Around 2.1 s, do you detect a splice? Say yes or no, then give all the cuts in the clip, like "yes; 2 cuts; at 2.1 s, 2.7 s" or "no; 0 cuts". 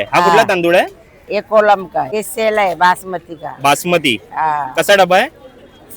yes; 1 cut; at 2.1 s